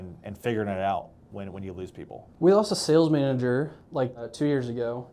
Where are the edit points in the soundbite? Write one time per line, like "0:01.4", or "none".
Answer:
0:02.2
0:04.0